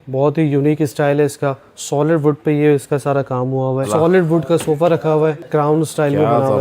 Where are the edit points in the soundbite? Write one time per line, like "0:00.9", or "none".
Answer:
0:03.9
0:05.4